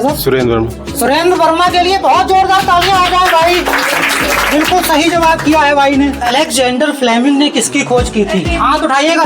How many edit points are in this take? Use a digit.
1